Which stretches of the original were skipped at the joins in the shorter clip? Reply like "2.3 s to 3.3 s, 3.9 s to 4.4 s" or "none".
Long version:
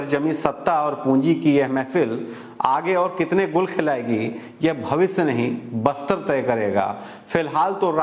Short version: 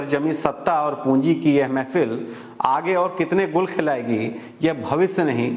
none